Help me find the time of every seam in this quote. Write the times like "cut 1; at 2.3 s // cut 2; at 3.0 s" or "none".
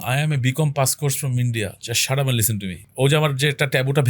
cut 1; at 2.8 s